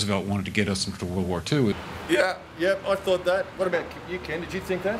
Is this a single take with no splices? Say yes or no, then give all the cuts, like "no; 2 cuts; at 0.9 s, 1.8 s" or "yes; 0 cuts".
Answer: yes; 0 cuts